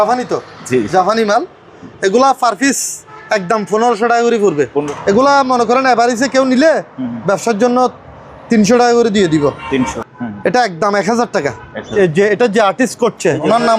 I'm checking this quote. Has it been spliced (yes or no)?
yes